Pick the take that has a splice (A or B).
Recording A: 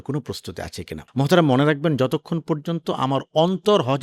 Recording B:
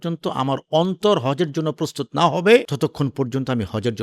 B